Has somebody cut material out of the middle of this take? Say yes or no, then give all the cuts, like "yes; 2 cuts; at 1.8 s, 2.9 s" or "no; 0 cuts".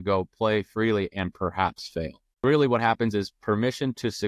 yes; 1 cut; at 2.4 s